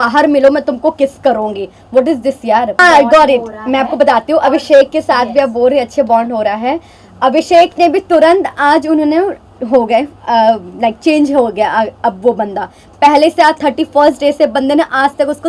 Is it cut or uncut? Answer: cut